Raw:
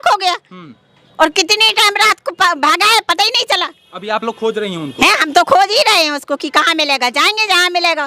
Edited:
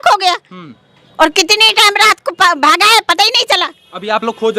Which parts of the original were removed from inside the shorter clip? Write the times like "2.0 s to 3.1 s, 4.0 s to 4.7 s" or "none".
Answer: none